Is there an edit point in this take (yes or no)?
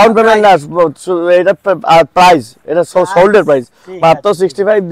no